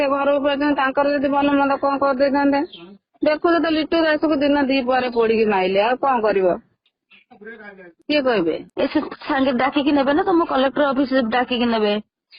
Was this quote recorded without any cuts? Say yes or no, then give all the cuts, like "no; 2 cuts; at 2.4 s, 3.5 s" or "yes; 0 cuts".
no; 1 cut; at 6.9 s